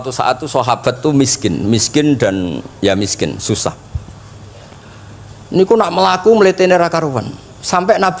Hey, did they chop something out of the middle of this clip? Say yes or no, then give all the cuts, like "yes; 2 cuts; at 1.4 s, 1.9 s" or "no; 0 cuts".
no; 0 cuts